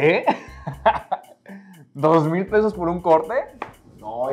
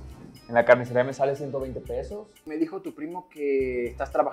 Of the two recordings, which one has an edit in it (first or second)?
second